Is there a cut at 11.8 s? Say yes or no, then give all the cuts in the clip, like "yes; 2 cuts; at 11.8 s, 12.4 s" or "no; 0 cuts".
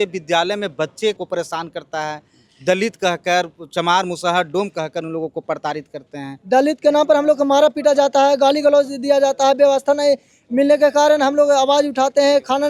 no; 2 cuts; at 1.2 s, 6.4 s